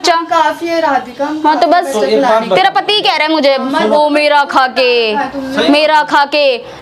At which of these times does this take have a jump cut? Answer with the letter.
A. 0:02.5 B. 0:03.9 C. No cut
B